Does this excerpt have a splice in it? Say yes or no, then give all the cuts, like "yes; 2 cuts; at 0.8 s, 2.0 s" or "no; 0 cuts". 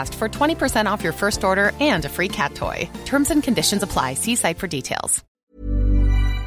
yes; 1 cut; at 5.2 s